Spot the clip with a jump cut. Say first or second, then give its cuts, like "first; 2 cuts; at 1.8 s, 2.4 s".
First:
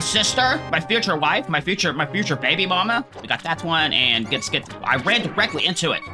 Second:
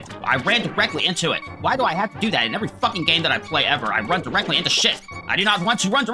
first; 1 cut; at 3.2 s